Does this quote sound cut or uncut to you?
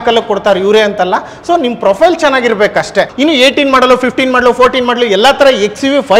cut